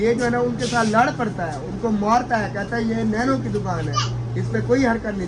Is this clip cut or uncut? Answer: uncut